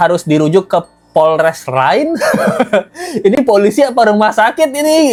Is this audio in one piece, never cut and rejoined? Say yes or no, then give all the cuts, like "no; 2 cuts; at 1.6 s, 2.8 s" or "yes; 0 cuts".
yes; 0 cuts